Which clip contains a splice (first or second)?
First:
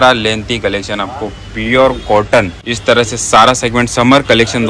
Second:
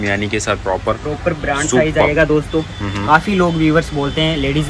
first